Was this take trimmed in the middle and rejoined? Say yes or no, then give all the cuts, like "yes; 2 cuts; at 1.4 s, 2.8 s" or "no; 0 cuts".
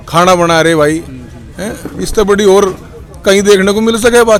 no; 0 cuts